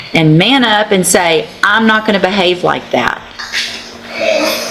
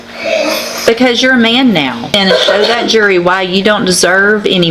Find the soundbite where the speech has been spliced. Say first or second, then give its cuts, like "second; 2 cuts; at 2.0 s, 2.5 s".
second; 1 cut; at 2.1 s